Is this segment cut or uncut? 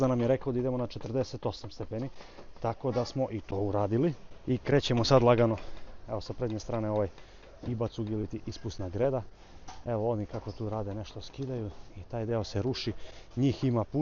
uncut